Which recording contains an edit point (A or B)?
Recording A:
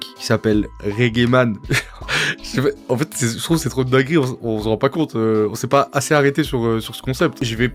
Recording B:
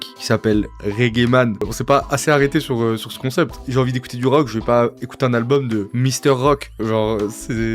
B